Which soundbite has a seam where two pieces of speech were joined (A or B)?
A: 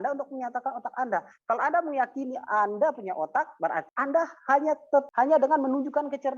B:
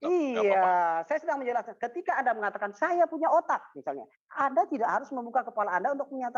A